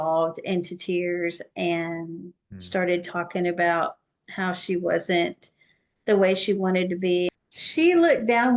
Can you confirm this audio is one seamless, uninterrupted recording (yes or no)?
no